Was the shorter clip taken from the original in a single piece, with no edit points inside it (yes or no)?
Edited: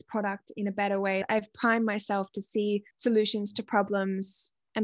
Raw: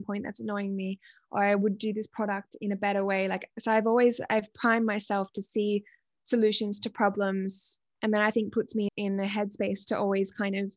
no